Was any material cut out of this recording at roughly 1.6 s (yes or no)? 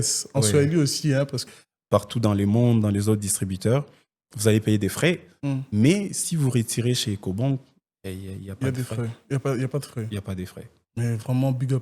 yes